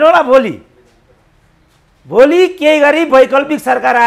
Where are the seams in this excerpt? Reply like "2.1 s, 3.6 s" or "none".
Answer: none

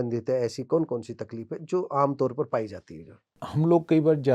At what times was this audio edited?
3.3 s

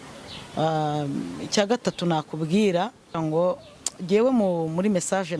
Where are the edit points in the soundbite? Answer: 3.2 s

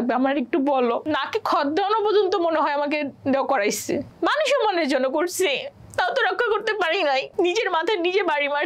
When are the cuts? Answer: 1.0 s, 4.1 s, 7.3 s

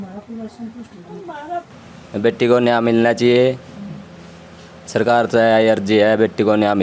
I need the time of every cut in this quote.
1.8 s

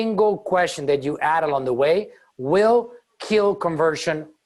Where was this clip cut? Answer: none

